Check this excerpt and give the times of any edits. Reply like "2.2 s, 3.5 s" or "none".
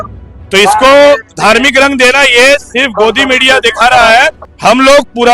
4.3 s